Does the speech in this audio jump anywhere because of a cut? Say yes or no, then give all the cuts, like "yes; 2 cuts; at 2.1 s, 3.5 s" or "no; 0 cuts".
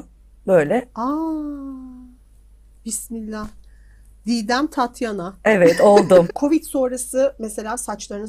yes; 1 cut; at 6.3 s